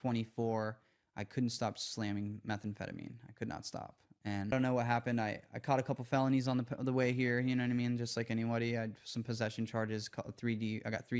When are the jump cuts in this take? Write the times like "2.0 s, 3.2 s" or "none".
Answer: 4.5 s